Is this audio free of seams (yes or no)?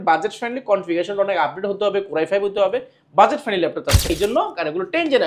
no